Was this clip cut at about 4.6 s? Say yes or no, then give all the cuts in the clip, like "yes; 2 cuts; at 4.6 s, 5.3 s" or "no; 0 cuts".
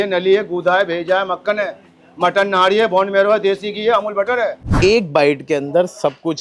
yes; 1 cut; at 4.6 s